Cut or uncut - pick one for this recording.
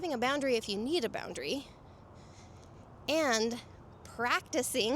uncut